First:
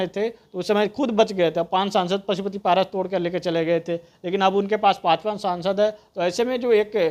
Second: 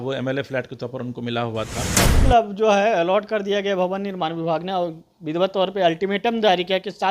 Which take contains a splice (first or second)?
second